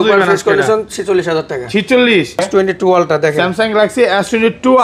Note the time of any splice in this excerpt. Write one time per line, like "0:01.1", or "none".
0:02.4

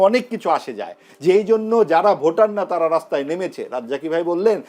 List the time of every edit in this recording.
none

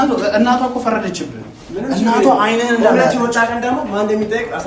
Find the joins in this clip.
none

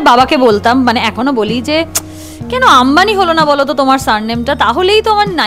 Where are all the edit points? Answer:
none

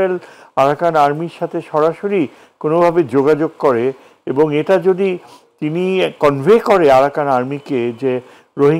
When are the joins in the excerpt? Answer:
none

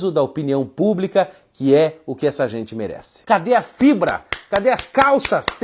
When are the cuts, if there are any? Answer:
0:03.3

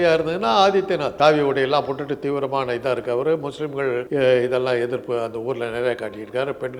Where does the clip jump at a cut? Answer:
0:01.1
0:04.1

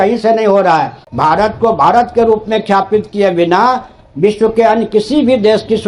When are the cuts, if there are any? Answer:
0:01.0

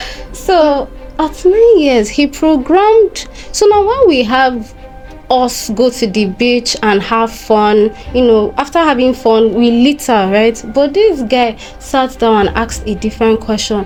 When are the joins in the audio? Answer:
none

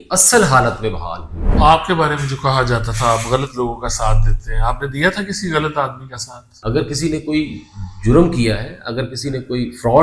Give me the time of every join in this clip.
0:01.4
0:06.5

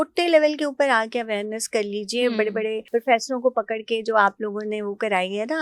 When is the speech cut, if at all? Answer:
0:02.8

